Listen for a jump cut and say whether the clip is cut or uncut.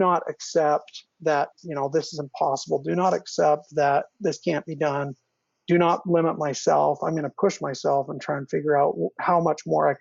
uncut